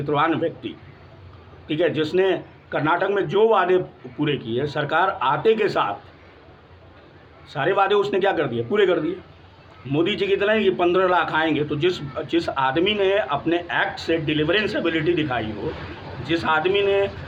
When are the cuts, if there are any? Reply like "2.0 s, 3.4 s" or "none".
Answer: none